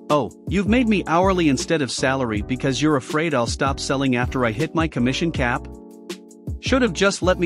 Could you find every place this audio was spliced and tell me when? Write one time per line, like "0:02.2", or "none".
none